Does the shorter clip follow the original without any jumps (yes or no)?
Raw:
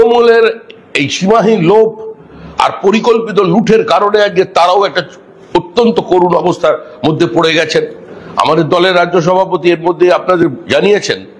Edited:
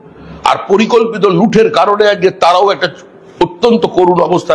yes